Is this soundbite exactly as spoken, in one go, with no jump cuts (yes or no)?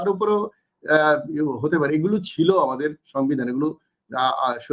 yes